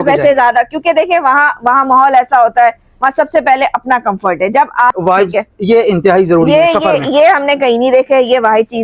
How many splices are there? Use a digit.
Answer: 1